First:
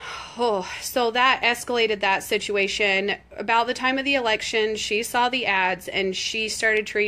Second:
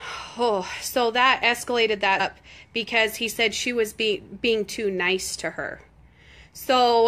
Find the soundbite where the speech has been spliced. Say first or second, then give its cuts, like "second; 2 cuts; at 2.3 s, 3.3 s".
first; 1 cut; at 2.2 s